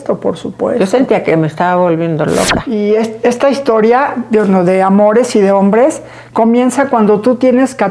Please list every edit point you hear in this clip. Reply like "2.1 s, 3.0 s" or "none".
2.6 s